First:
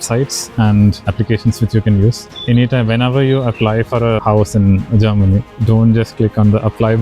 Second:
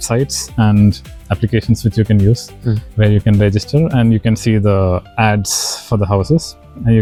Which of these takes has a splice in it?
first; 3 cuts; at 1.0 s, 2.3 s, 4.2 s

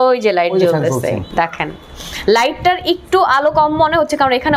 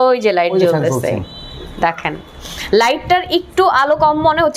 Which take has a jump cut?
first; 1 cut; at 1.2 s

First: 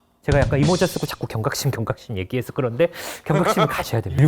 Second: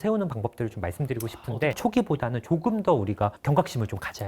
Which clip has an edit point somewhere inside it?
second; 2 cuts; at 1.7 s, 3.4 s

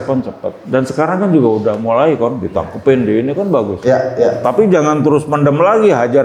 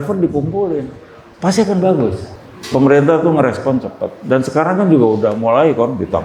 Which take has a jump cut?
second; 1 cut; at 2.3 s

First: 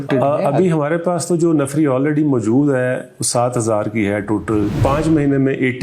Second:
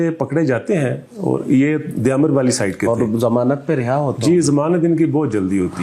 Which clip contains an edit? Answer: first; 1 cut; at 4.8 s

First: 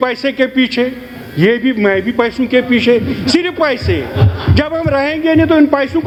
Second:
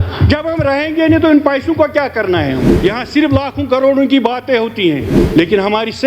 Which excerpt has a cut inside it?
second; 2 cuts; at 2.7 s, 5.2 s

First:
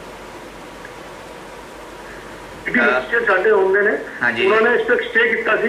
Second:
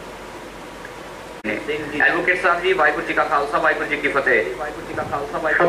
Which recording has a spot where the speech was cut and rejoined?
first; 1 cut; at 1.4 s

